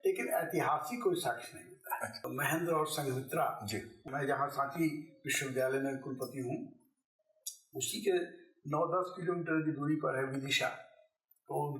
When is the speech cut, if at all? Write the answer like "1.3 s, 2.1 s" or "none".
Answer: 2.2 s, 4.0 s